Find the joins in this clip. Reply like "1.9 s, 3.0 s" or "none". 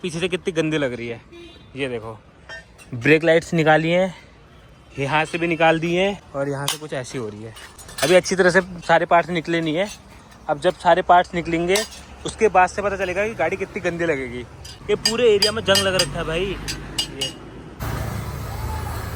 none